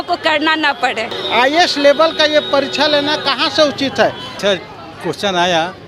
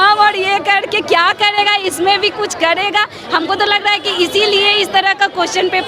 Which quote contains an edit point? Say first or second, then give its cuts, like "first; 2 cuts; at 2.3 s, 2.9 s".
first; 2 cuts; at 1.2 s, 4.4 s